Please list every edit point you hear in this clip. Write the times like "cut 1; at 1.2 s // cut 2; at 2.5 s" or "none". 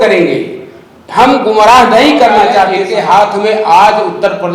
cut 1; at 2.8 s